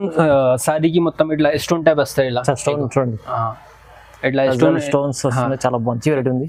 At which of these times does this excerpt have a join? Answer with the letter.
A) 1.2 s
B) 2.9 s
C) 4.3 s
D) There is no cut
D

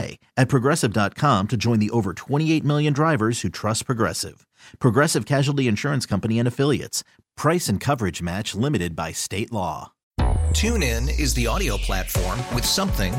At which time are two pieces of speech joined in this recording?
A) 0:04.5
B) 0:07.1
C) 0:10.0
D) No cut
C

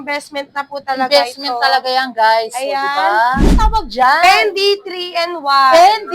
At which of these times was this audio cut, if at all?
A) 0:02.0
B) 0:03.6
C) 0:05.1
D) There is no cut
B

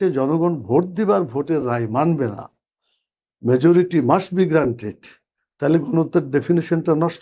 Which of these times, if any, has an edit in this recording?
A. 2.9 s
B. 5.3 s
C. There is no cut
C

